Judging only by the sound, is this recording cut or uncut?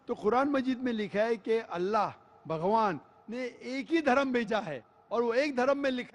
cut